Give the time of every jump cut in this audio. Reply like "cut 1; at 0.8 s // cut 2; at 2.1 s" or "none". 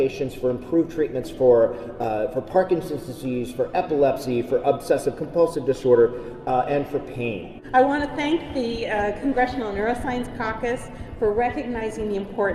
cut 1; at 7.5 s